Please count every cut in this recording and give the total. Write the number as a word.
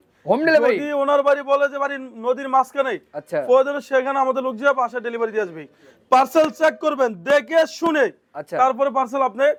zero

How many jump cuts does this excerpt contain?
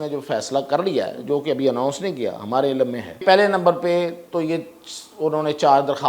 one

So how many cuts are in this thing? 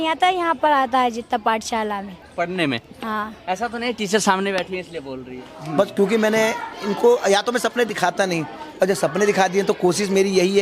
one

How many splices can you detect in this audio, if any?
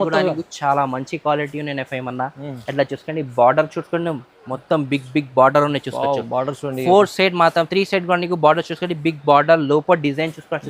zero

